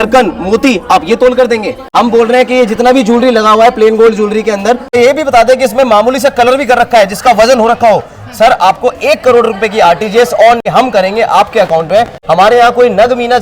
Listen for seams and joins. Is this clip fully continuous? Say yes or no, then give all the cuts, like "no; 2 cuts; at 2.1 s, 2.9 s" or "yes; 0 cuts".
no; 4 cuts; at 1.8 s, 4.9 s, 10.6 s, 12.2 s